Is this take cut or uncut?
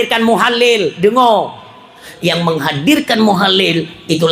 cut